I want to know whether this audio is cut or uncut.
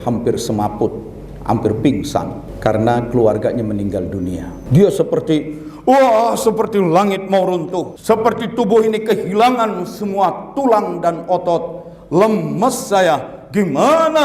cut